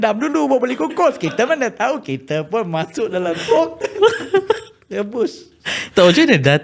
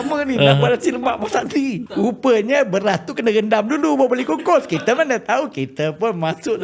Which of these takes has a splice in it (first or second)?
second